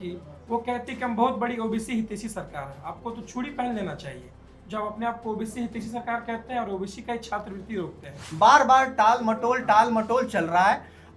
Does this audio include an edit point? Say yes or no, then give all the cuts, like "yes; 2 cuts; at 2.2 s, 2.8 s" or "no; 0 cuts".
yes; 1 cut; at 8.2 s